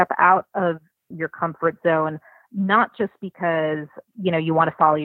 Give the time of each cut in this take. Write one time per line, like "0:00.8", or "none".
0:01.1
0:04.0